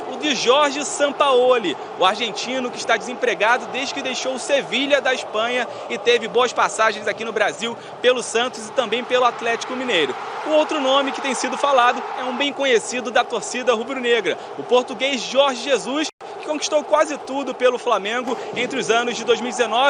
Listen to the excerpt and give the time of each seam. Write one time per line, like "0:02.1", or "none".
none